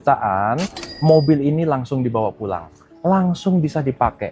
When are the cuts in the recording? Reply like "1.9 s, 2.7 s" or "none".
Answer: none

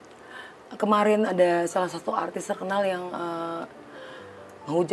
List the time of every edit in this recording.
3.6 s

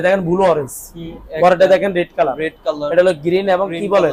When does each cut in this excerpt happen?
none

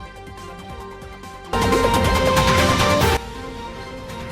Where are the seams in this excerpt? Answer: 1.2 s

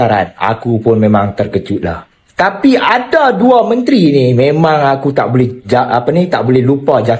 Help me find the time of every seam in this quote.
none

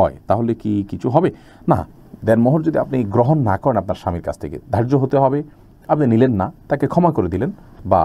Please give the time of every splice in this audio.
none

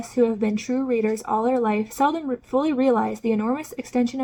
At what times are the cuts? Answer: none

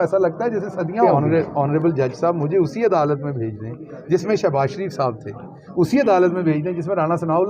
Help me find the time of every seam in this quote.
1.2 s

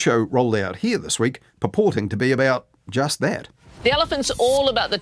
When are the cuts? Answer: none

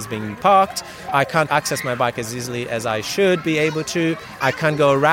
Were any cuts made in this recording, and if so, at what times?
1.3 s, 4.3 s

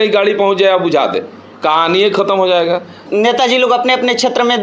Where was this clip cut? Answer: 3.1 s

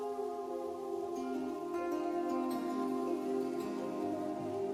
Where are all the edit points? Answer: none

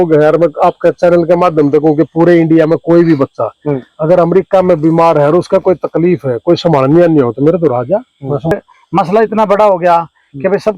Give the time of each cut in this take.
8.5 s

